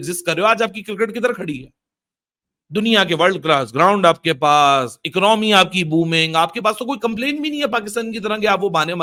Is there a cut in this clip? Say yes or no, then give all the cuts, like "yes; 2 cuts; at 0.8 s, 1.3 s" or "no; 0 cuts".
no; 0 cuts